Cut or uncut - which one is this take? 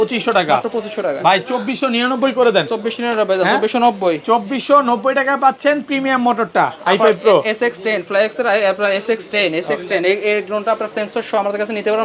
uncut